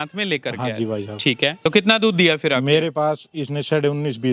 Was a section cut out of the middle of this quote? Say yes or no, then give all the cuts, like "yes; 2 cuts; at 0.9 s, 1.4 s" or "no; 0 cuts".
yes; 1 cut; at 1.6 s